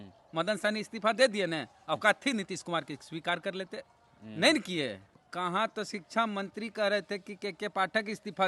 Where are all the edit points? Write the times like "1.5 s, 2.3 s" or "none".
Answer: 5.1 s